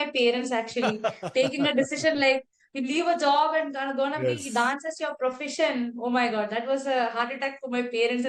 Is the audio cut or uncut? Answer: uncut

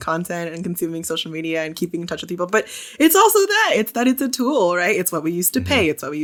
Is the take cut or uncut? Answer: uncut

